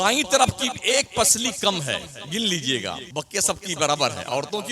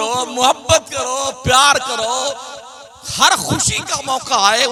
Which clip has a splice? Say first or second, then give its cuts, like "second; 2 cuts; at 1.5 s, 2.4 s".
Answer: first; 1 cut; at 3.1 s